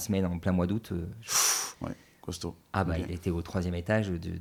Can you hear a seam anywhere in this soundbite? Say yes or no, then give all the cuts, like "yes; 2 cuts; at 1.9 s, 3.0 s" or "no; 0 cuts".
no; 0 cuts